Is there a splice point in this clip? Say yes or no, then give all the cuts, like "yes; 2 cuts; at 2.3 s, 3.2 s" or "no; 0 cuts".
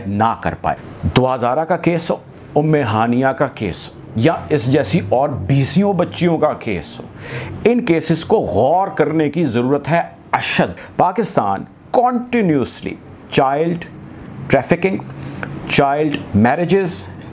yes; 2 cuts; at 0.9 s, 10.8 s